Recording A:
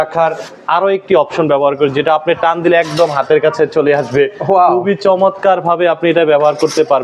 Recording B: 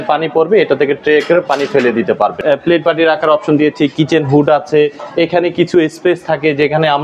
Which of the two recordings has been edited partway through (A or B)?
B